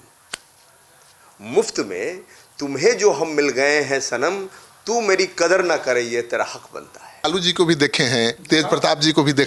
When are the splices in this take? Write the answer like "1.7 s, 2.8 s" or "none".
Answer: 7.2 s